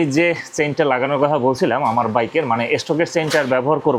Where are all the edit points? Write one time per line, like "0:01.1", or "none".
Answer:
none

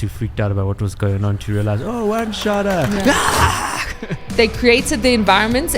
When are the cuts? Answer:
0:04.3

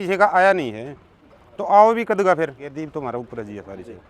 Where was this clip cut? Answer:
0:02.7

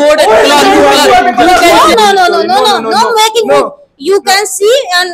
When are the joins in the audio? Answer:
0:01.8

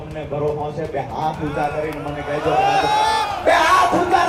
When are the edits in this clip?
none

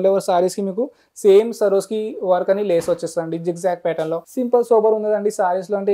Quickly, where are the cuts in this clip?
0:04.3

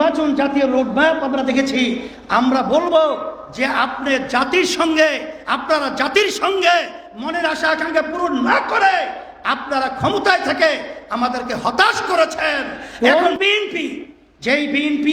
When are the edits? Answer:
0:12.9

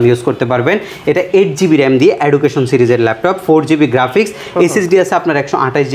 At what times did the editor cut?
none

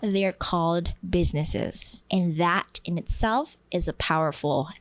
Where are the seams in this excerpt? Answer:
0:01.0
0:01.9

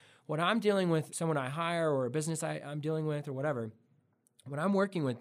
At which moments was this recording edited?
0:01.1

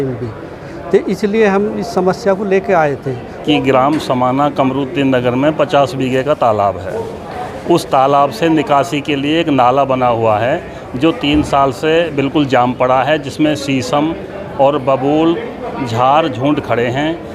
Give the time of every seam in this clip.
0:03.4

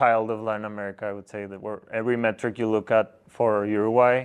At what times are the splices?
none

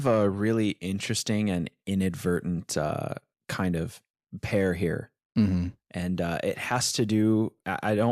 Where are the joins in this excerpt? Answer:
none

